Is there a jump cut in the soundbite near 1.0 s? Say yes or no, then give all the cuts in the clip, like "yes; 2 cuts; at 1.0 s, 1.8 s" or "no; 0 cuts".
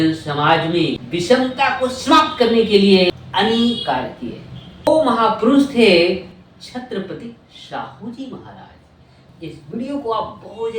yes; 4 cuts; at 1.0 s, 3.1 s, 4.9 s, 9.3 s